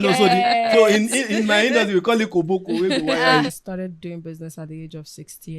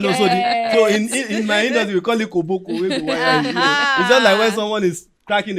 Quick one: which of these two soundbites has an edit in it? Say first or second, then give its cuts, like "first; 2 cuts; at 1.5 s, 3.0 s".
first; 1 cut; at 3.5 s